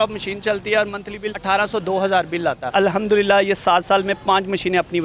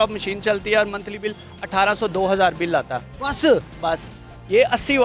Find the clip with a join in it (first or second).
first